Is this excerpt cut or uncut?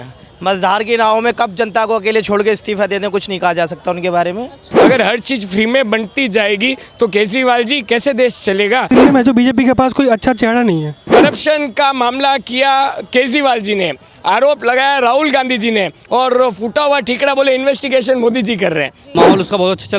cut